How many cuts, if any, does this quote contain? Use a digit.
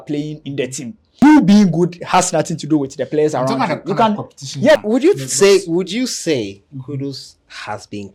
2